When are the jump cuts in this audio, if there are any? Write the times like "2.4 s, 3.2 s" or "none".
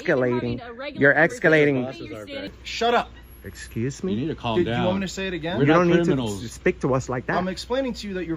2.5 s